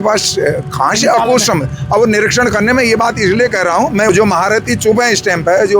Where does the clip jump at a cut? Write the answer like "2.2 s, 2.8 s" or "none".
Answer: 4.1 s

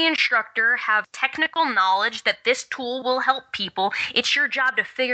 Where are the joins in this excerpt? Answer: 1.1 s

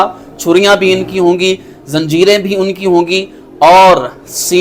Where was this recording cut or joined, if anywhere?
none

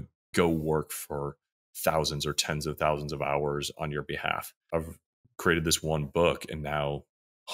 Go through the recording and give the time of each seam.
4.6 s

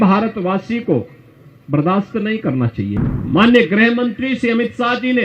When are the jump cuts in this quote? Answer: 2.9 s

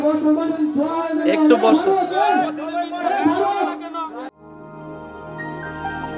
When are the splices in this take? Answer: 4.3 s

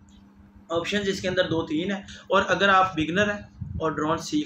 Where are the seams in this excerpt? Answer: 2.1 s

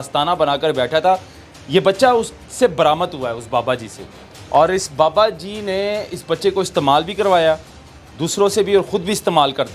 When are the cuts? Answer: none

